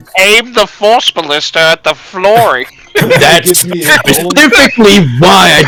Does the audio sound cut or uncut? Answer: uncut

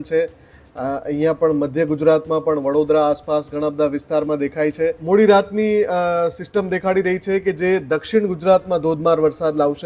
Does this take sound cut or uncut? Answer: cut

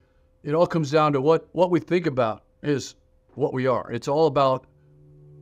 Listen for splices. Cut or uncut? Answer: uncut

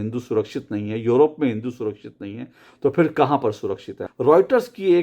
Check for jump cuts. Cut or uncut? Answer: cut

